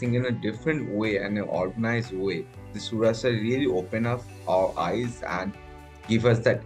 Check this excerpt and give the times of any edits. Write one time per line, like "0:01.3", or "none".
none